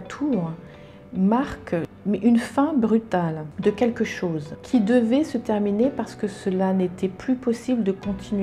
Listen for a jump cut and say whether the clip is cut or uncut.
cut